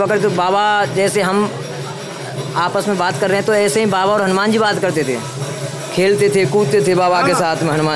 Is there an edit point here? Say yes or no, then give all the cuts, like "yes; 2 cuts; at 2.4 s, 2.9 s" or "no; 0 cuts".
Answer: no; 0 cuts